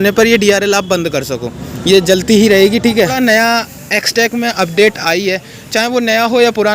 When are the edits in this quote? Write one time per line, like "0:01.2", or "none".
0:03.2